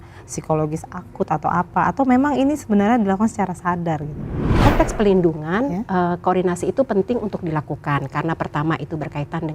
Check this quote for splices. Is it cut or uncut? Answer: cut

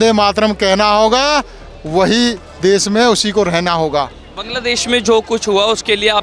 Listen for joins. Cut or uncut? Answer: uncut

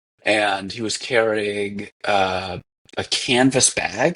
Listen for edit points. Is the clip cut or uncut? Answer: uncut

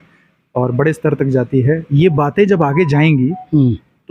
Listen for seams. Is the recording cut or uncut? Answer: uncut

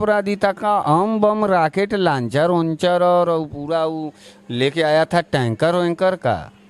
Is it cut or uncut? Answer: uncut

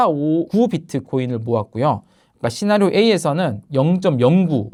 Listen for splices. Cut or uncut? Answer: uncut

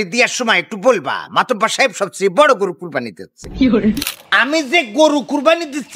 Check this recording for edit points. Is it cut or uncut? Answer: cut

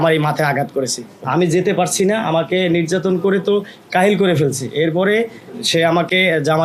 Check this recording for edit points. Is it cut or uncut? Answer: cut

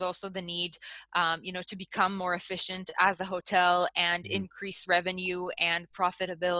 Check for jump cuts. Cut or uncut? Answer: uncut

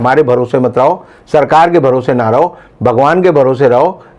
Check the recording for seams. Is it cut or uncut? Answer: uncut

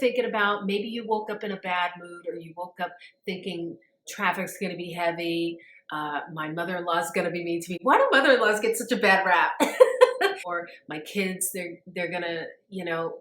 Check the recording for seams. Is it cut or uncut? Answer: cut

